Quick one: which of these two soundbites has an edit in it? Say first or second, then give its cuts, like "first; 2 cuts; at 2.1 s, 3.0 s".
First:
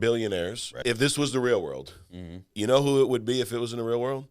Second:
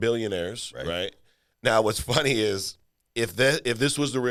first; 2 cuts; at 0.8 s, 2.5 s